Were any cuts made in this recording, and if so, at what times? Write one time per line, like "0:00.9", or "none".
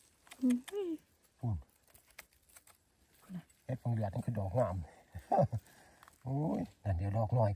none